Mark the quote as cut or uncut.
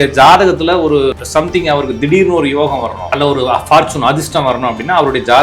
cut